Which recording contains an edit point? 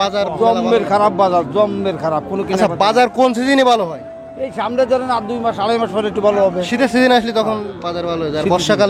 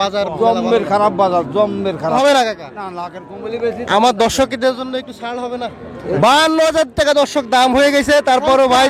second; 2 cuts; at 2.2 s, 6.2 s

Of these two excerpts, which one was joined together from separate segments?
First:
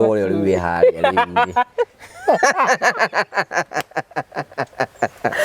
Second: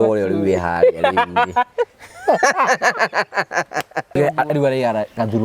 second; 1 cut; at 4.2 s

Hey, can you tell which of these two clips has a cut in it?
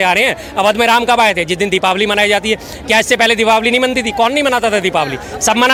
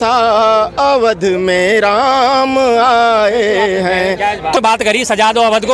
second; 1 cut; at 4.6 s

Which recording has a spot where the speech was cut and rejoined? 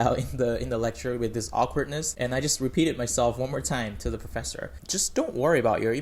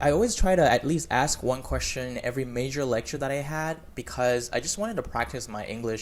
first; 2 cuts; at 2.0 s, 4.8 s

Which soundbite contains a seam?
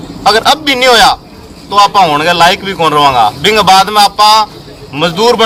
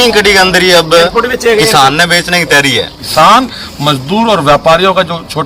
second; 1 cut; at 3.0 s

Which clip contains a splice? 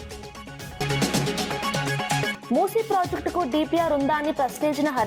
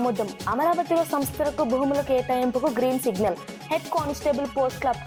first; 2 cuts; at 0.8 s, 2.3 s

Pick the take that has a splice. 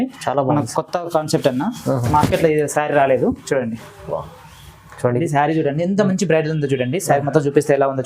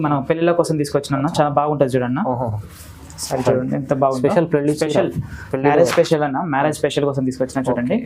first; 1 cut; at 5.2 s

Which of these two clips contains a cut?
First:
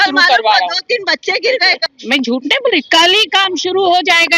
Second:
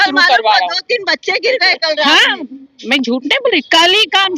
first; 1 cut; at 1.8 s

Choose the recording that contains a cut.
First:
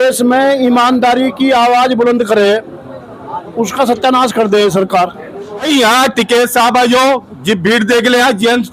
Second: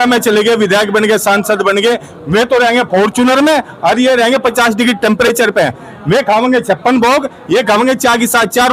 first; 1 cut; at 5.7 s

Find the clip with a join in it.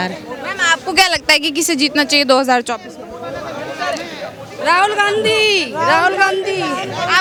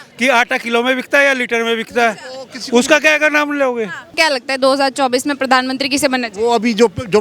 second; 1 cut; at 4.1 s

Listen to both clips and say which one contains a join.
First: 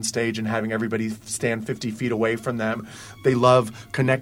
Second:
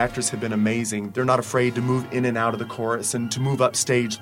second; 1 cut; at 1.1 s

